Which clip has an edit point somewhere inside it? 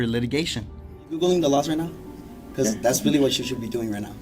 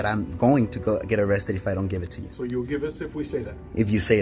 first; 1 cut; at 1.2 s

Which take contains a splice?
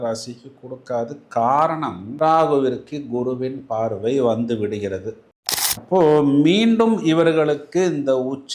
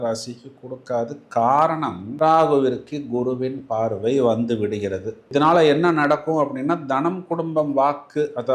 first; 1 cut; at 5.2 s

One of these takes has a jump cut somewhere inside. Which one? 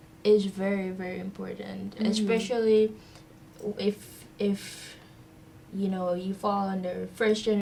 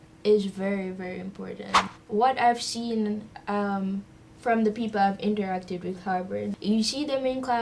second; 2 cuts; at 1.8 s, 6.5 s

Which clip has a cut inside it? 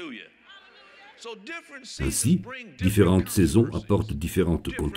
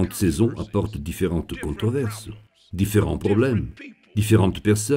first; 1 cut; at 2.0 s

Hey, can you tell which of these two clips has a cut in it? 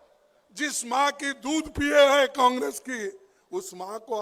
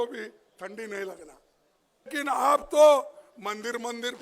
second; 1 cut; at 2.1 s

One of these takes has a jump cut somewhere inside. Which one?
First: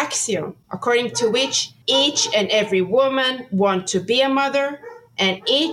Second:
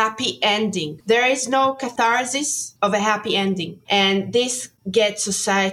second; 2 cuts; at 1.0 s, 1.9 s

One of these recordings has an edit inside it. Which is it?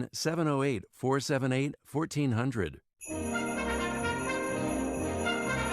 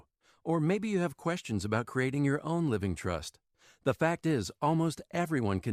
first; 1 cut; at 2.8 s

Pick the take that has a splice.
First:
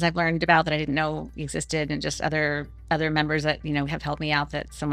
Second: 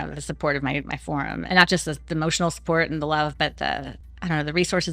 second; 2 cuts; at 1.4 s, 4.0 s

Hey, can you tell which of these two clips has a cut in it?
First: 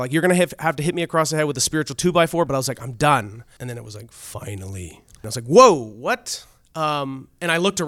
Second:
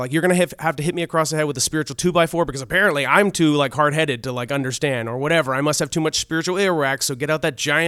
first; 3 cuts; at 2.5 s, 3.4 s, 5.3 s

